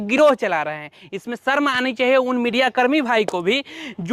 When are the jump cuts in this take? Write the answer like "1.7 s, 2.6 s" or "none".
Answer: none